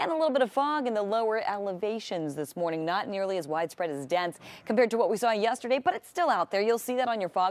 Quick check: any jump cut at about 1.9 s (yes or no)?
yes